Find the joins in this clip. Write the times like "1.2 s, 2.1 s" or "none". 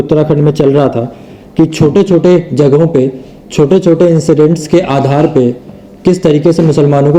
none